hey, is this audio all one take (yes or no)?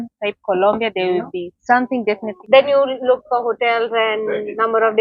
no